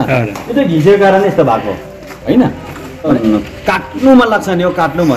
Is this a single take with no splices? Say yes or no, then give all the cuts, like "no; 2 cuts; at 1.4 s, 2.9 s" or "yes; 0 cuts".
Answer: no; 1 cut; at 3.1 s